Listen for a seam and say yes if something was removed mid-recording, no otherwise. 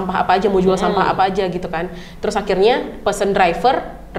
no